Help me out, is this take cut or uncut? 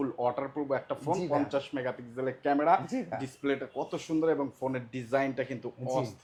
uncut